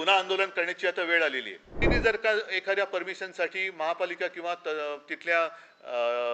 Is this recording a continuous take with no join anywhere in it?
no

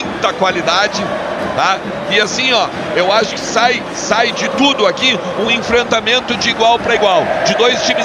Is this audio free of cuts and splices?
yes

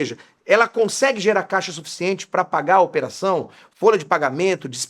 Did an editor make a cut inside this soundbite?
no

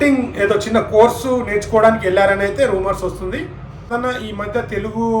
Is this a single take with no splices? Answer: no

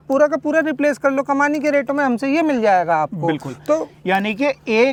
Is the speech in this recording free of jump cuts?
yes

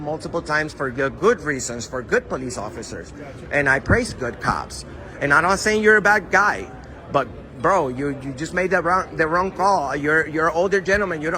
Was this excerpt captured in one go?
yes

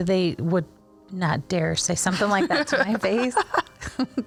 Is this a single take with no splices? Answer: yes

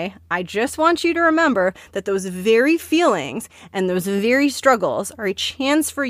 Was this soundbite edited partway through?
no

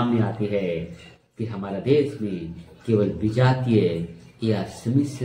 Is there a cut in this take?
no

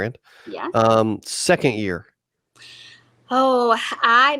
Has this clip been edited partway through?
no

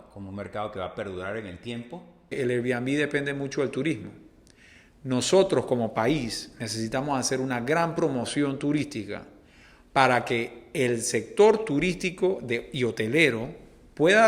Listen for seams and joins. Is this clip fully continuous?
no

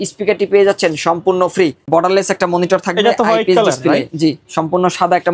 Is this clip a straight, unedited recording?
no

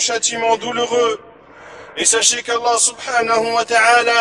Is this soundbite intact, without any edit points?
yes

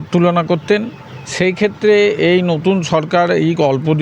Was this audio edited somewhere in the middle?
no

